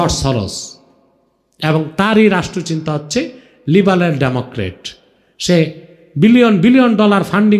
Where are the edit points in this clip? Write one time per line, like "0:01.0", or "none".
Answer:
none